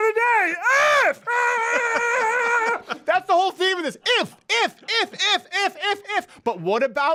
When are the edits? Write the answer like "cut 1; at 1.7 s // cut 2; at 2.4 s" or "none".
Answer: none